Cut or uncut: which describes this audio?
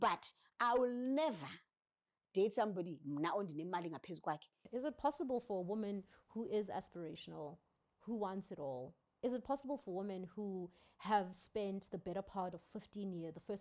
cut